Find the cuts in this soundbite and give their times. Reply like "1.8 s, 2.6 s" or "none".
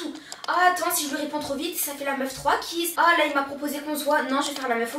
2.9 s